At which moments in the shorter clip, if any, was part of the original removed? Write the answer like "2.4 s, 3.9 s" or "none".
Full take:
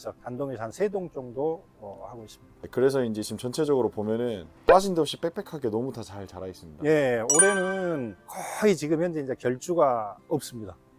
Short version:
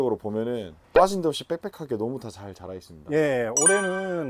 none